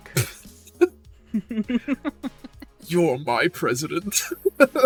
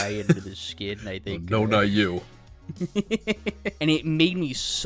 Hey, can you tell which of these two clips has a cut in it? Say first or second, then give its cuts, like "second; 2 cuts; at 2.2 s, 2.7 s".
second; 1 cut; at 3.7 s